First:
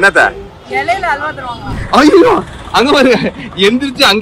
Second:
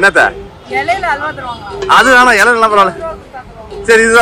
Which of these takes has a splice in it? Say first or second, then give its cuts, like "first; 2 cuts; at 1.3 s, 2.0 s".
first; 1 cut; at 1.7 s